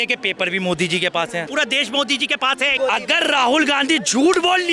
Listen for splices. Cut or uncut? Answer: cut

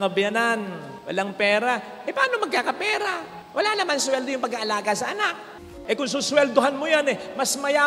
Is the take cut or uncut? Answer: cut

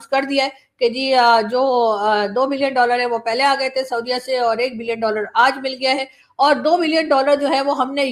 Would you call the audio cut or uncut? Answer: uncut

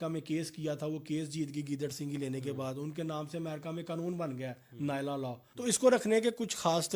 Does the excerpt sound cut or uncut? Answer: cut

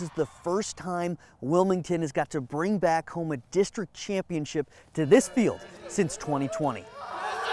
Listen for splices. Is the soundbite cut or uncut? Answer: uncut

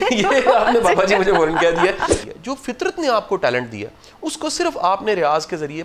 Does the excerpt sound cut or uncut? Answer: cut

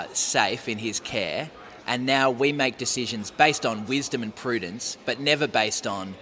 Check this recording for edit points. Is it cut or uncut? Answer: uncut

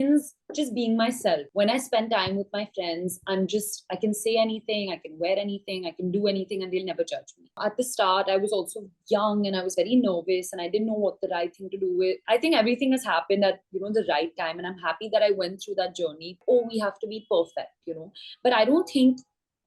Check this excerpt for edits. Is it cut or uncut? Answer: cut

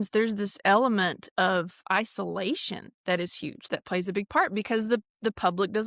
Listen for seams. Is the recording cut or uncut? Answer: uncut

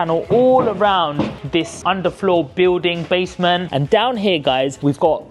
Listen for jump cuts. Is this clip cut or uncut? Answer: cut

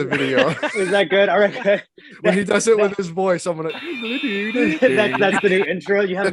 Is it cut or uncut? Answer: uncut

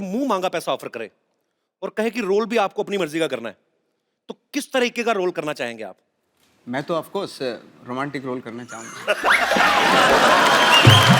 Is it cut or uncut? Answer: uncut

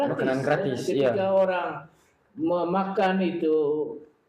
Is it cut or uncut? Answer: uncut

